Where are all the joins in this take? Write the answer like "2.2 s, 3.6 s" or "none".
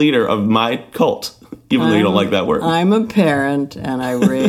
none